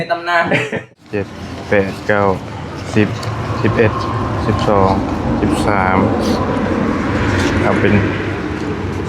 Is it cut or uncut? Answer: cut